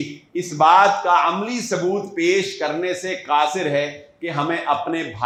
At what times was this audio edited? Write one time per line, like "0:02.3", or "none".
none